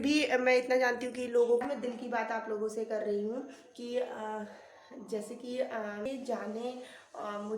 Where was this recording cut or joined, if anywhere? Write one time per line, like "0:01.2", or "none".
0:01.6
0:06.1

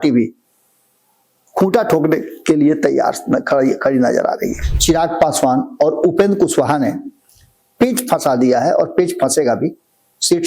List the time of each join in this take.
0:04.7

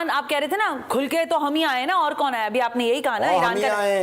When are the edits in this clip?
none

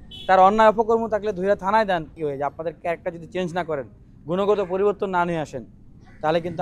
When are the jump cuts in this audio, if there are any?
0:02.1

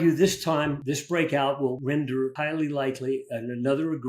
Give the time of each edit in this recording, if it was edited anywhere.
0:00.8
0:02.1

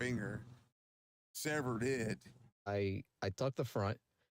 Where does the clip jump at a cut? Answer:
0:02.7

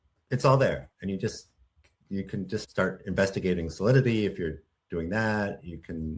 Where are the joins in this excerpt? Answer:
0:02.7

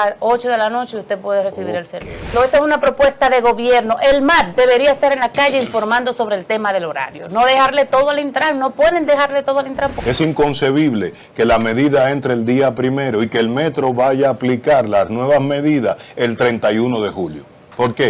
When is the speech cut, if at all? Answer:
0:02.3
0:10.0

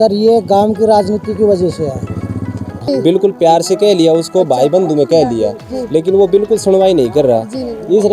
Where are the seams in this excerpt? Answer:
0:02.7

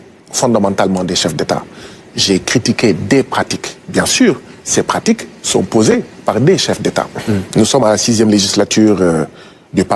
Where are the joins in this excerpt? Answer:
0:07.5

